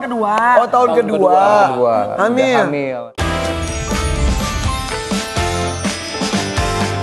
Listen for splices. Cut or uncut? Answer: uncut